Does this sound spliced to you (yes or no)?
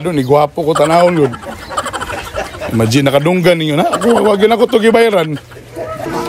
no